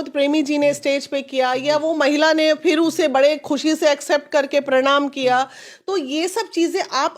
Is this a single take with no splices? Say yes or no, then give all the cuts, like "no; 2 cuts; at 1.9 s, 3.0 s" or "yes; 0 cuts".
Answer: yes; 0 cuts